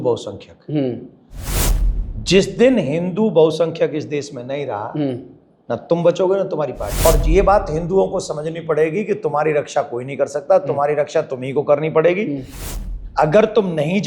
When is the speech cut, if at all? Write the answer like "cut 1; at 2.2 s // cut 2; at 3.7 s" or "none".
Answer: cut 1; at 6.9 s

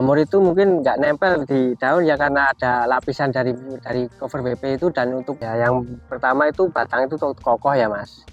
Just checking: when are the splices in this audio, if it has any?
cut 1; at 5.4 s

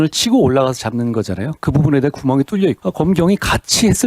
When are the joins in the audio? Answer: cut 1; at 2.8 s

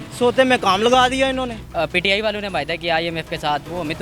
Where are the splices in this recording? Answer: cut 1; at 1.6 s

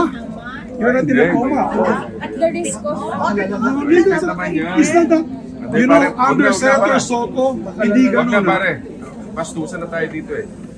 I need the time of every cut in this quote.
none

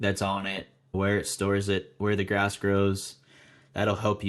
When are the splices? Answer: cut 1; at 0.9 s

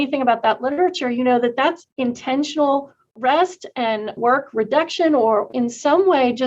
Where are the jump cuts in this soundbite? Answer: cut 1; at 1.9 s // cut 2; at 4.1 s // cut 3; at 5.5 s

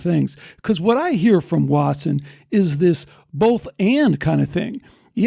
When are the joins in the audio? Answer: none

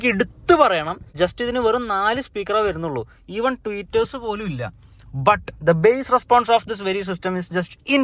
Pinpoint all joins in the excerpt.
cut 1; at 1.1 s

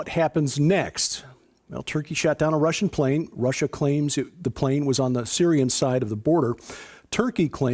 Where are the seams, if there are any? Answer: cut 1; at 5.1 s

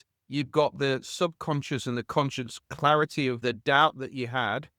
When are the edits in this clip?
cut 1; at 3.4 s

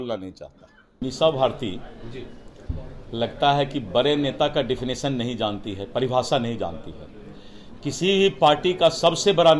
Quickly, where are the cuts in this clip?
cut 1; at 0.9 s

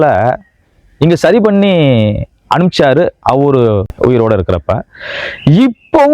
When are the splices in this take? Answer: cut 1; at 3.9 s

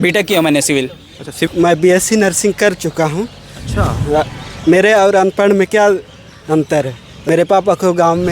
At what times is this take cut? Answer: cut 1; at 1.5 s // cut 2; at 7.3 s

